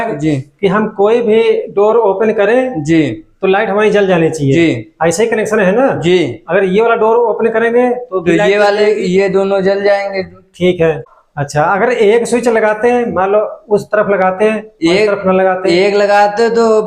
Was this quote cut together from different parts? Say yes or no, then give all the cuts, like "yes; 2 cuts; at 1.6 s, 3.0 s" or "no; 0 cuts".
yes; 1 cut; at 11.1 s